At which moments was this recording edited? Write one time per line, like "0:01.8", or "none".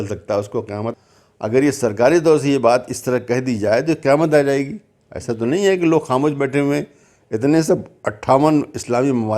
0:00.9